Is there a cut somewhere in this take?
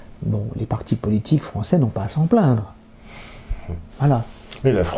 no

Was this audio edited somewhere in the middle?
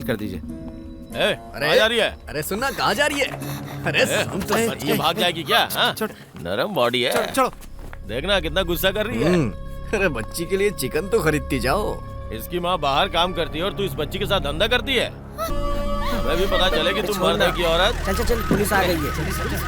yes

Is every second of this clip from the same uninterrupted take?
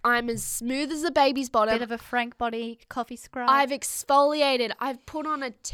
yes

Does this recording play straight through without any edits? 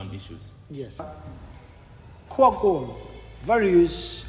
no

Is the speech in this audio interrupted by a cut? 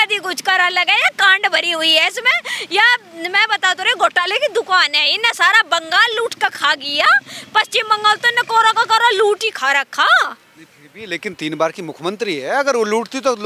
no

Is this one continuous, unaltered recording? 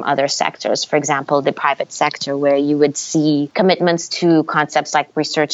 no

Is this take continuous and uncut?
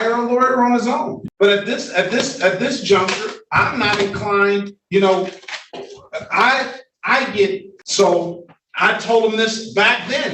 no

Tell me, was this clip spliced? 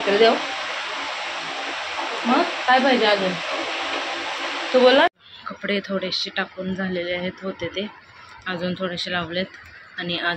yes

